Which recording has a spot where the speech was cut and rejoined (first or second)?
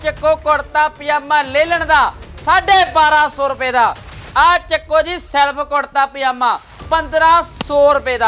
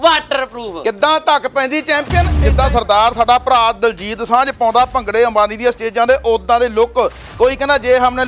second